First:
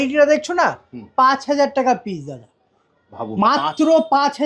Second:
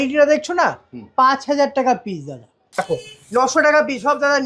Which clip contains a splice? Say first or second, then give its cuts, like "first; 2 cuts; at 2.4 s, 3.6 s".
second; 1 cut; at 2.8 s